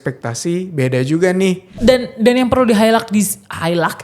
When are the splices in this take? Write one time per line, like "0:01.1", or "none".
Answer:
0:01.7